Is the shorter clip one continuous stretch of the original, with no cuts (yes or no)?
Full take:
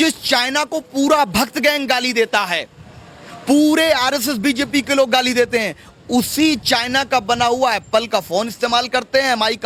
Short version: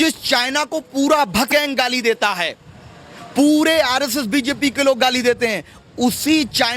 no